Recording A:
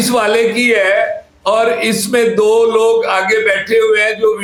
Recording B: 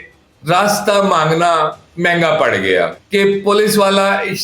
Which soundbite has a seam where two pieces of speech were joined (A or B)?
B